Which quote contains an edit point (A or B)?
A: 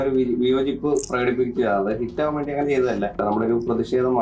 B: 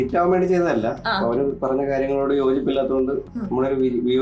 A